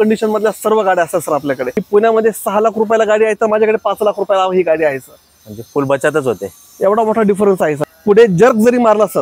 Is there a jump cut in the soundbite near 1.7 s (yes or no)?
yes